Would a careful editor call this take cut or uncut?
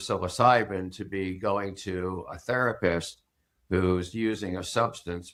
uncut